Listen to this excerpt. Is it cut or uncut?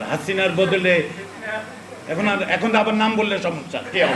uncut